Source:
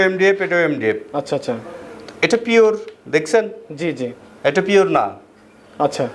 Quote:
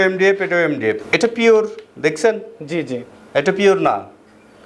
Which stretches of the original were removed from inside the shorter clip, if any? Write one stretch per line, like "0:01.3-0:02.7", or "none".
0:01.0-0:02.1